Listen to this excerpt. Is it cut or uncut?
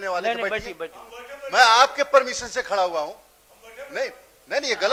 uncut